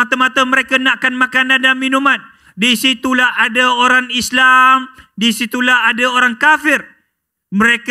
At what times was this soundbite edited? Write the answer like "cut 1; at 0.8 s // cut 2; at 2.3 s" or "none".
none